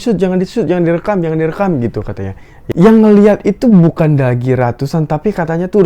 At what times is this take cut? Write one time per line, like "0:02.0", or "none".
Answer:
0:02.6